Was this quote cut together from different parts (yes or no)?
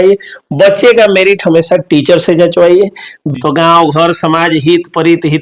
yes